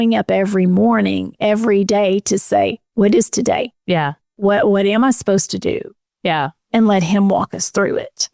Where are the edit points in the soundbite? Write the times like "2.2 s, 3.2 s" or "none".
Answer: none